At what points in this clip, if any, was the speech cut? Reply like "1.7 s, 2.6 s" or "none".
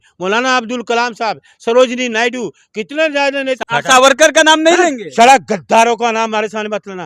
3.5 s